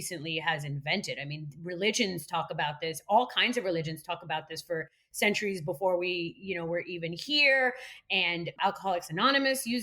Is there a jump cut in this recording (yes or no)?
yes